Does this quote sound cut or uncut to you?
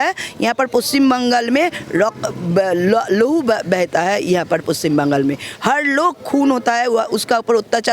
uncut